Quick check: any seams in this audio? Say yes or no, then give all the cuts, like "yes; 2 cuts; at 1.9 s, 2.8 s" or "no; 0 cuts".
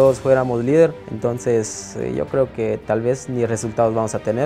yes; 1 cut; at 1.1 s